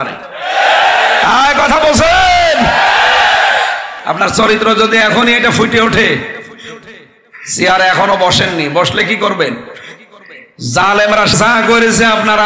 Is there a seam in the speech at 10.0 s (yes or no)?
no